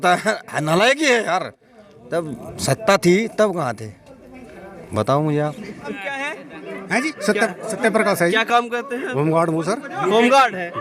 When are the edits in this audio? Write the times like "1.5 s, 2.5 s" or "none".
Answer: 6.0 s